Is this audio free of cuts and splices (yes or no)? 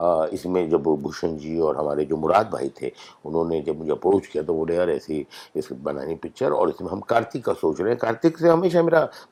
yes